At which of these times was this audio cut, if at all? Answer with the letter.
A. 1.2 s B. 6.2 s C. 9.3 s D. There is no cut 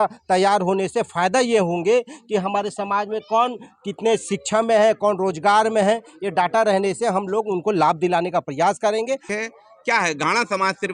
C